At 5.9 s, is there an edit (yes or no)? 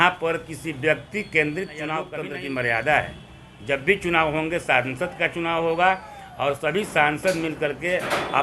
no